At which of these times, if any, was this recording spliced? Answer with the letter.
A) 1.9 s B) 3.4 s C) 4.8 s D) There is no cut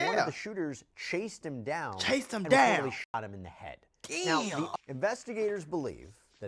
C